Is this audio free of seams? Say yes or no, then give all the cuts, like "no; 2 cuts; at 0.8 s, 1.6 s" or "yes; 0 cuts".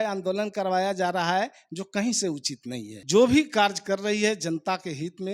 no; 1 cut; at 2.9 s